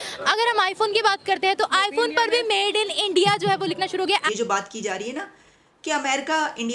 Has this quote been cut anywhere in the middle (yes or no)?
yes